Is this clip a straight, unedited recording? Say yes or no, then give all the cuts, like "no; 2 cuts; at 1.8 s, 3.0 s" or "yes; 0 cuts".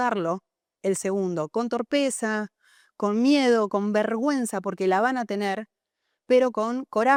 yes; 0 cuts